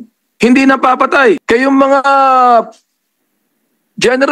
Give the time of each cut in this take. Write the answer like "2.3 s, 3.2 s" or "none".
1.4 s